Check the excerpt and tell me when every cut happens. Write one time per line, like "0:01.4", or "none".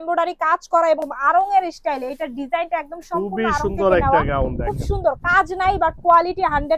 0:01.1